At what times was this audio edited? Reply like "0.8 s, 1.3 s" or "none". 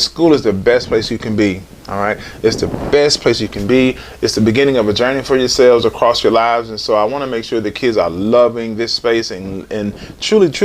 none